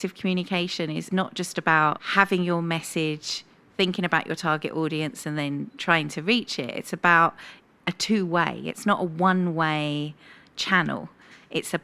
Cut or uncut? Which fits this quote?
cut